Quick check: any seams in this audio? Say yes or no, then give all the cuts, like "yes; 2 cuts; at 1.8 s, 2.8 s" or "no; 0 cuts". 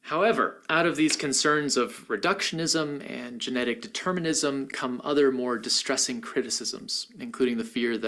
no; 0 cuts